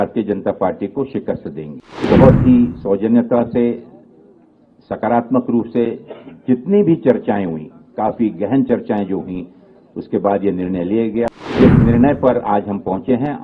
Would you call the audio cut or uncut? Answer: cut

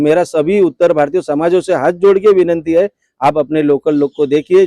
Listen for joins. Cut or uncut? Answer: uncut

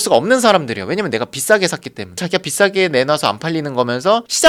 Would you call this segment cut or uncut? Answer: uncut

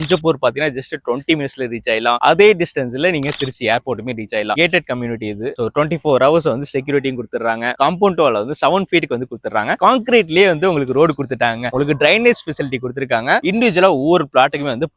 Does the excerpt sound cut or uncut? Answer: cut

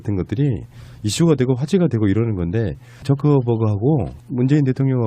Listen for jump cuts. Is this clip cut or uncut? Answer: cut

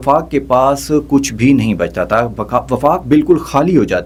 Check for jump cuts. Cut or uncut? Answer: uncut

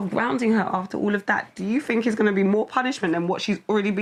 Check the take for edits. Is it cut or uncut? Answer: uncut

